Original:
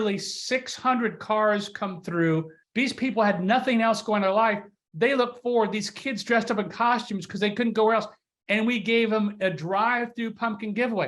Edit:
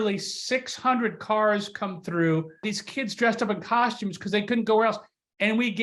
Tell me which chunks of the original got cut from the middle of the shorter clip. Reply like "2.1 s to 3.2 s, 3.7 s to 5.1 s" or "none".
2.7 s to 5.8 s